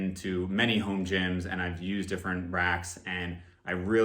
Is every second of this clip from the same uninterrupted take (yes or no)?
yes